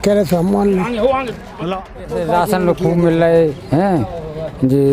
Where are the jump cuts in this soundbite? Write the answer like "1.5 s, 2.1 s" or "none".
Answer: 2.0 s